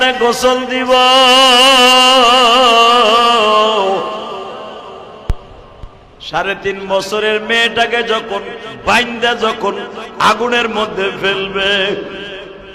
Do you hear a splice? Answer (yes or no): no